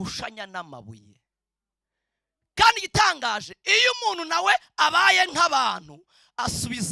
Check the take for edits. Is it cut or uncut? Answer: uncut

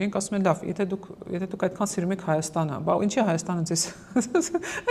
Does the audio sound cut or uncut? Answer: uncut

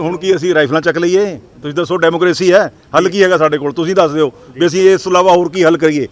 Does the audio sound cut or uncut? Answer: uncut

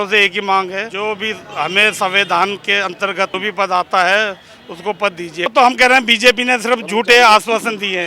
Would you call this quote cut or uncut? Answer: cut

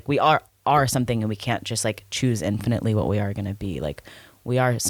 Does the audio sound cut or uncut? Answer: uncut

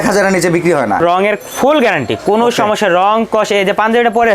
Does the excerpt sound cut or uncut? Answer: cut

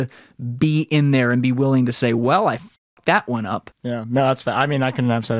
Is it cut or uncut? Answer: cut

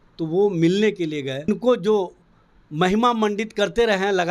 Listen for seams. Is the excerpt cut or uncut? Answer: cut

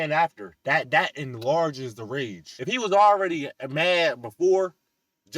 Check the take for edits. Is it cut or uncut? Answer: cut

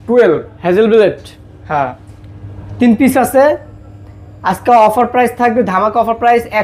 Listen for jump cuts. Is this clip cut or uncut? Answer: uncut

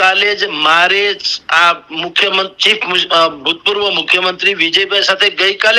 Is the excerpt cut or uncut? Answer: uncut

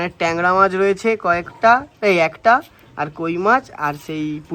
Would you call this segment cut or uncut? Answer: uncut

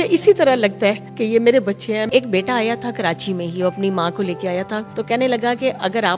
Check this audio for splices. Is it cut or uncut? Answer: cut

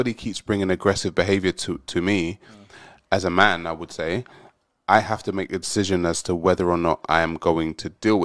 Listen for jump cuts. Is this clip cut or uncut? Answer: uncut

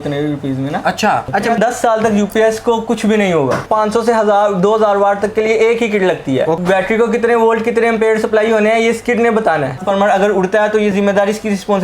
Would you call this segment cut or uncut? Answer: cut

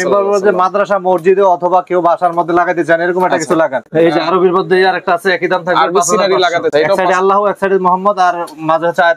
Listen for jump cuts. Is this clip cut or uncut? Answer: cut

